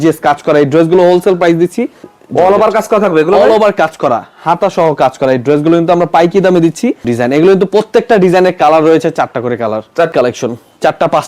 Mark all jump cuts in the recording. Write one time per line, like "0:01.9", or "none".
0:02.0
0:07.1
0:10.1